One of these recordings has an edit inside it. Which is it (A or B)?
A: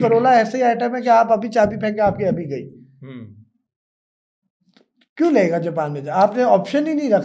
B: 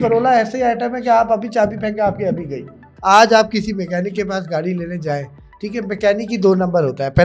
B